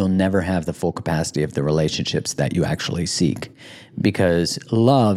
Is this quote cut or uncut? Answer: uncut